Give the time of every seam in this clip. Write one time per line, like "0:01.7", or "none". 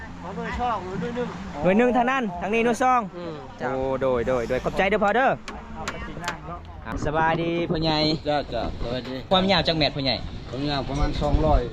0:06.9
0:09.3